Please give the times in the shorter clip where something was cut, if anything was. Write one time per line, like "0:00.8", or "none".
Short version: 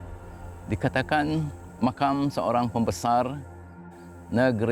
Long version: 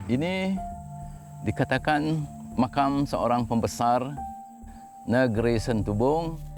none

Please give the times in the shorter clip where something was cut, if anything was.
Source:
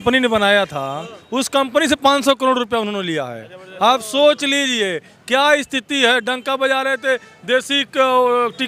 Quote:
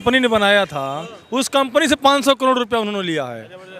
none

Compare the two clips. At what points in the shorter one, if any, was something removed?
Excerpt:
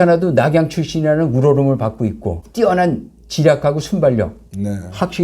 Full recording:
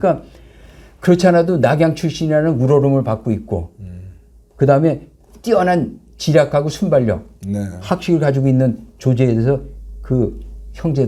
0:02.4

